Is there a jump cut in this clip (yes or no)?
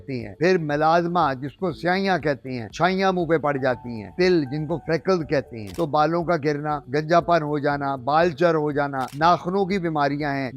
yes